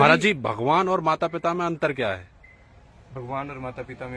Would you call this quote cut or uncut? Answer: uncut